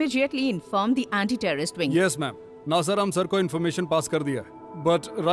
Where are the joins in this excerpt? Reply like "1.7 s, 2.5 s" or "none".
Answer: none